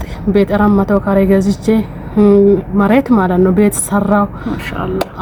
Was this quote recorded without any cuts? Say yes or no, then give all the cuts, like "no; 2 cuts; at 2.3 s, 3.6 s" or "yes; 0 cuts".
yes; 0 cuts